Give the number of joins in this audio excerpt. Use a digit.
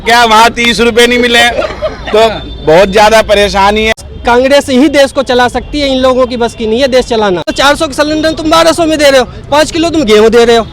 2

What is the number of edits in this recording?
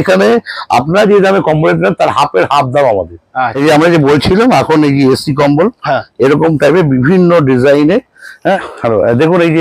2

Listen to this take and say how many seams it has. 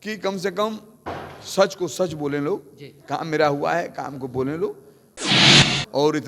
1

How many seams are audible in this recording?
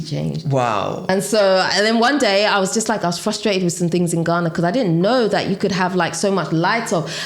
1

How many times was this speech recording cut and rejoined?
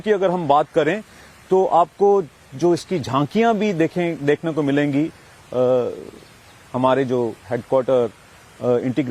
0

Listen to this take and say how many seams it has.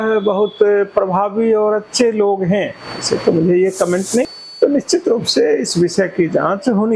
1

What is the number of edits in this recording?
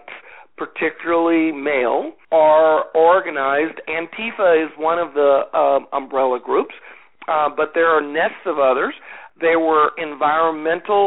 2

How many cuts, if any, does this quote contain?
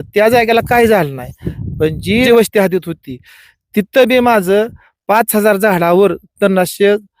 1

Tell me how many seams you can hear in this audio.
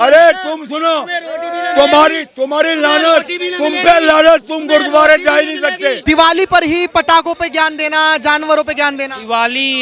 1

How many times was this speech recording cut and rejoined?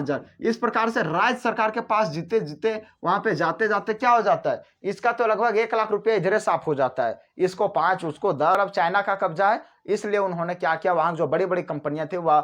1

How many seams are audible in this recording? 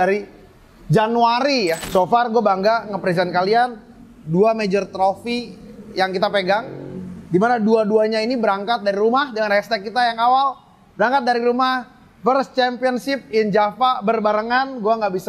1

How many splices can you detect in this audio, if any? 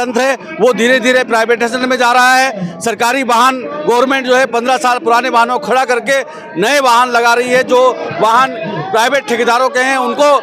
0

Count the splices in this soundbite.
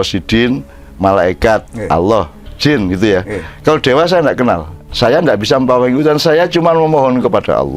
1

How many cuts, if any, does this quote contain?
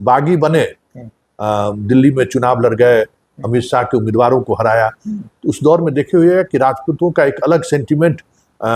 0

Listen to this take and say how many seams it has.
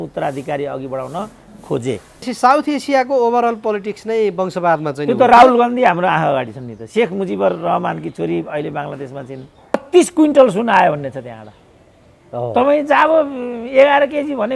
2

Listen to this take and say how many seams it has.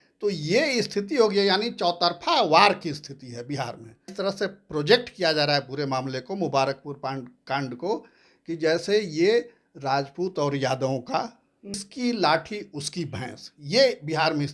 2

